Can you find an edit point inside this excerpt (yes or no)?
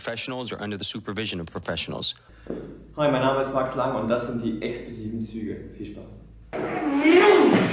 no